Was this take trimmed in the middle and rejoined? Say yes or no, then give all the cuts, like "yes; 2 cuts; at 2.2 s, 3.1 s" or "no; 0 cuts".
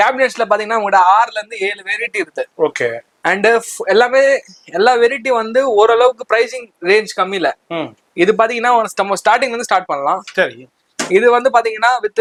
no; 0 cuts